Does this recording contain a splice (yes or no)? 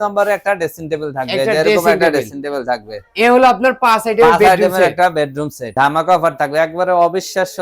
yes